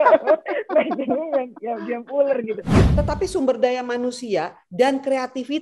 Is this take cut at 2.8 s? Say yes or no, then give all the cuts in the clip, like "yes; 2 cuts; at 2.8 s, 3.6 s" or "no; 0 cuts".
yes; 1 cut; at 2.8 s